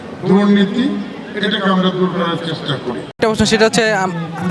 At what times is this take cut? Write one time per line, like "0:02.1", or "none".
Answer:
0:03.1